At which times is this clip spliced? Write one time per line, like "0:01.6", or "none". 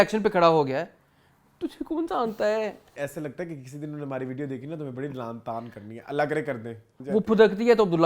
0:03.0
0:06.9